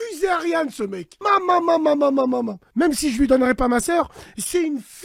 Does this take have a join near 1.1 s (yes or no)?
yes